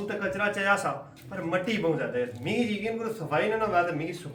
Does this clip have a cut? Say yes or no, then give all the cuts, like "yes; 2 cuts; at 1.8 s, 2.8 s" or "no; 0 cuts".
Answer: no; 0 cuts